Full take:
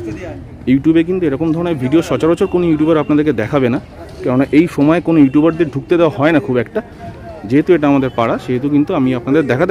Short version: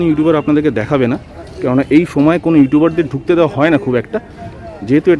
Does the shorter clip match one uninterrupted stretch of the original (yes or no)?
yes